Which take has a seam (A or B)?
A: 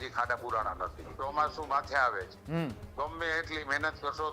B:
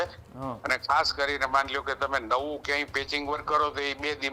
A